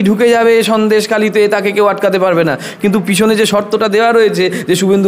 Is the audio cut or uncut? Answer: uncut